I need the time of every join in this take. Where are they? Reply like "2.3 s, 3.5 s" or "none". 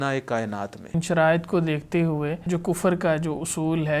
1.0 s, 2.4 s